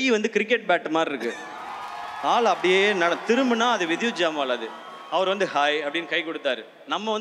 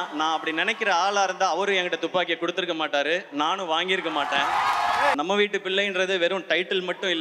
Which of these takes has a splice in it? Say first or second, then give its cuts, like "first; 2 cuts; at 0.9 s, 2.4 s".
second; 1 cut; at 5.1 s